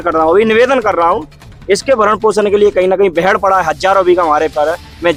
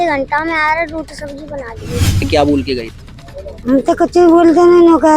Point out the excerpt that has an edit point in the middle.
second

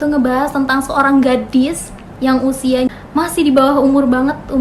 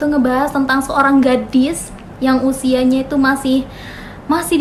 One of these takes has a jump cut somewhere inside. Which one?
first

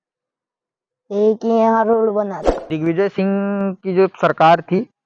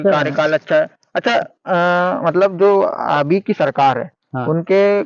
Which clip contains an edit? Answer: first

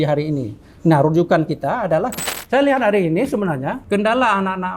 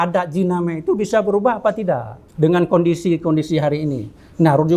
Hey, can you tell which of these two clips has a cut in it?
first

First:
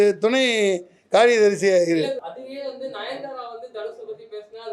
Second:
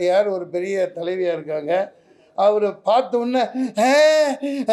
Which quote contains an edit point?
first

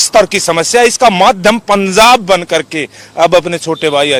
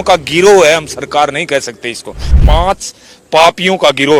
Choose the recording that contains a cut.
second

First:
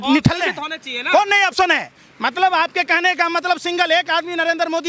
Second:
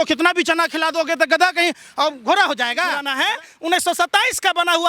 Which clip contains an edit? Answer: second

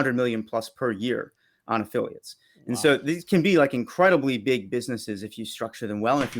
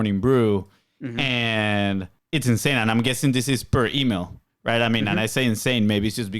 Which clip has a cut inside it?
second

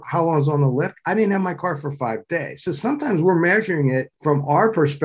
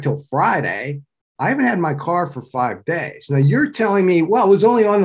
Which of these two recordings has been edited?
first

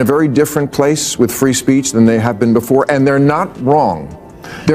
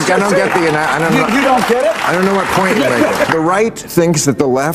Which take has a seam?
second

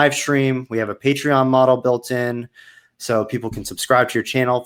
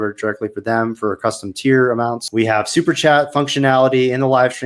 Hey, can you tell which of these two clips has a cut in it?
second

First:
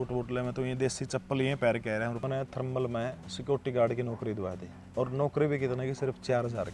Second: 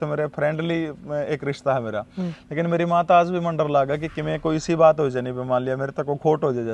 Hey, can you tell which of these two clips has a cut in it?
first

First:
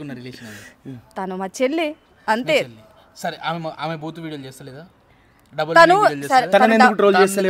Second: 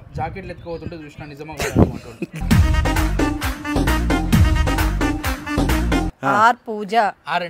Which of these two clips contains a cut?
second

